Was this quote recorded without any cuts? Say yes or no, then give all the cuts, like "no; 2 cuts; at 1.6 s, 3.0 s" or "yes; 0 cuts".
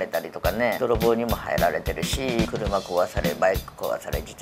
no; 2 cuts; at 0.8 s, 2.4 s